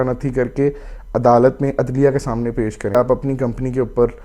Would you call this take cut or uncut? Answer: cut